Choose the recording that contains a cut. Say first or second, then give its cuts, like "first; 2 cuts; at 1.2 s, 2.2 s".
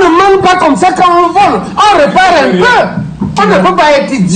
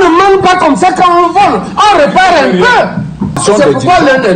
first; 1 cut; at 3.3 s